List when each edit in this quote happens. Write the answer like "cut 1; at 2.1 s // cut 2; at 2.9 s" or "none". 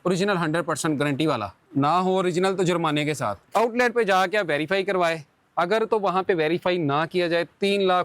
cut 1; at 1.6 s // cut 2; at 3.5 s